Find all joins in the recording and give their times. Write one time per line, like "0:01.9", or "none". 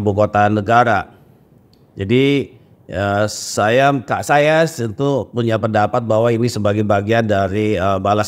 none